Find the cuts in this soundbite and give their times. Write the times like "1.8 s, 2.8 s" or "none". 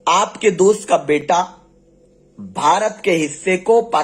none